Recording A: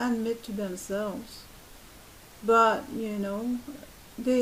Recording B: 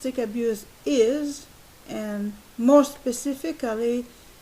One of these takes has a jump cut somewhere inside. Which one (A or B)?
B